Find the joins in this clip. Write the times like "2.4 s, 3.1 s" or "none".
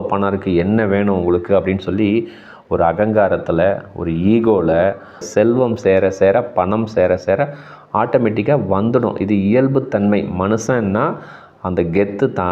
5.3 s